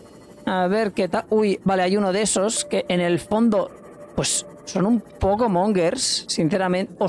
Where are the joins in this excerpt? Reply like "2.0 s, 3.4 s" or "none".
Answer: none